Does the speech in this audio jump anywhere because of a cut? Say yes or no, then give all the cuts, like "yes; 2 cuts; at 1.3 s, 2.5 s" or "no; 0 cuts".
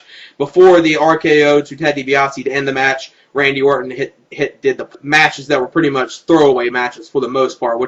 no; 0 cuts